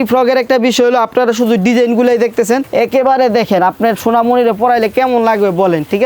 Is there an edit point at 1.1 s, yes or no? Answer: no